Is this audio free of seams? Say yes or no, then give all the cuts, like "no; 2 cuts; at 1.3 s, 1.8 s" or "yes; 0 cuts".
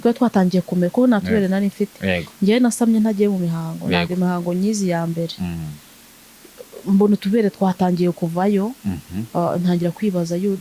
yes; 0 cuts